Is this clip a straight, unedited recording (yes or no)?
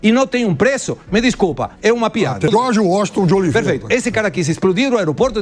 no